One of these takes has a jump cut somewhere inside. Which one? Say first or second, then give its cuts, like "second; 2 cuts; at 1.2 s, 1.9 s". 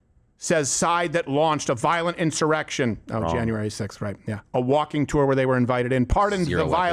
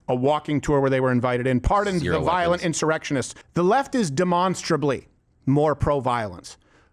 second; 1 cut; at 3.4 s